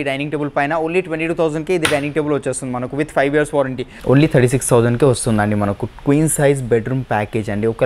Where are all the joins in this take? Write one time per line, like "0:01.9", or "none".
0:04.1